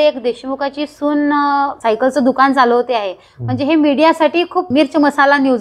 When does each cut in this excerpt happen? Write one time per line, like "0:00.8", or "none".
0:01.8
0:04.7